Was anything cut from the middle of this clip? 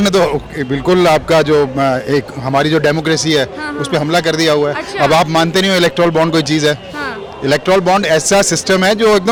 no; 0 cuts

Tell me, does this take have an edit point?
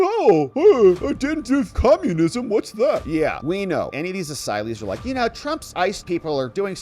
yes; 1 cut; at 3.9 s

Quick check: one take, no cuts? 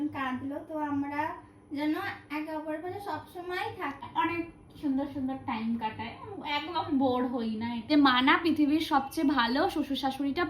no; 2 cuts; at 4.0 s, 7.8 s

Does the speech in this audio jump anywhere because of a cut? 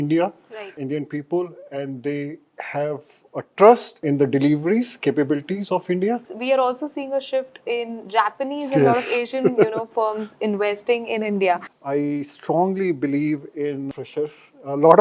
yes; 2 cuts; at 6.3 s, 11.6 s

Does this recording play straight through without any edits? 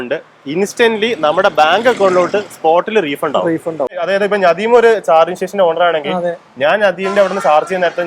no; 1 cut; at 4.0 s

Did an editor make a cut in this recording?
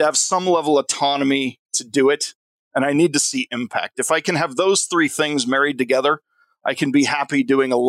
no; 0 cuts

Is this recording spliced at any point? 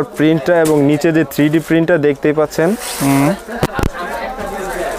no; 0 cuts

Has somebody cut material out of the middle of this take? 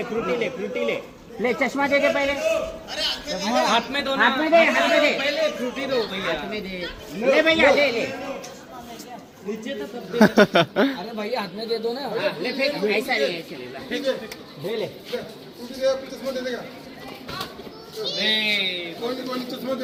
no; 0 cuts

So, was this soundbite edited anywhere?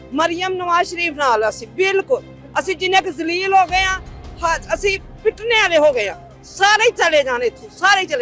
no; 0 cuts

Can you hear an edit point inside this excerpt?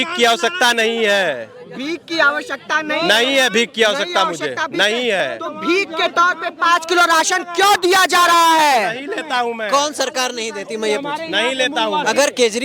no; 0 cuts

